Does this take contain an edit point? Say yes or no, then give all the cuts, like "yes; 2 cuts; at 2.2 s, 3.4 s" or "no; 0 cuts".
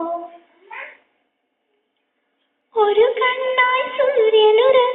no; 0 cuts